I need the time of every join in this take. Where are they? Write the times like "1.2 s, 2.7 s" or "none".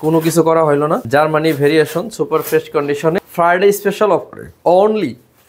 1.0 s, 3.2 s

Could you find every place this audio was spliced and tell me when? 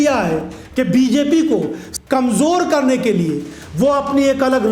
1.8 s

